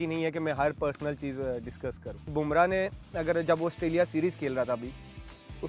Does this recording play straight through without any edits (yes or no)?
no